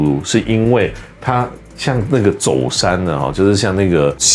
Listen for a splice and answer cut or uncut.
uncut